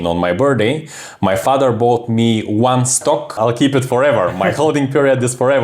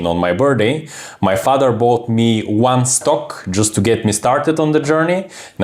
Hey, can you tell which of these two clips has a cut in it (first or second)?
first